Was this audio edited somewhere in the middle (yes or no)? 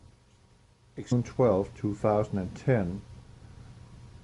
no